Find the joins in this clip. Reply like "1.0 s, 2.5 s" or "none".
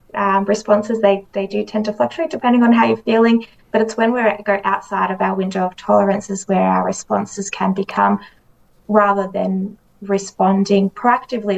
none